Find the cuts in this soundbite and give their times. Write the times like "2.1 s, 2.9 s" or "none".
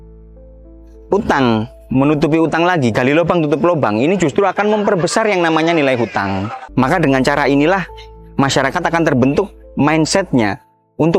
6.6 s